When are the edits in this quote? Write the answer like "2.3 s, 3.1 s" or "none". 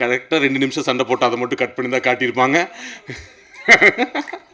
none